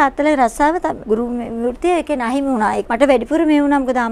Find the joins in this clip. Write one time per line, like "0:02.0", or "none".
0:01.0
0:02.8